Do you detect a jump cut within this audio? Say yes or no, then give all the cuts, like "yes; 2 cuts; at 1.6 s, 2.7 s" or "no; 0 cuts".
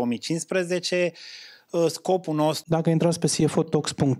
yes; 1 cut; at 2.6 s